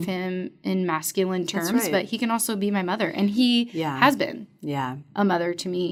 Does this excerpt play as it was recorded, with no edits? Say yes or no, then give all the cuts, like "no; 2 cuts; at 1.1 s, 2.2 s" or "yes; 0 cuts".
yes; 0 cuts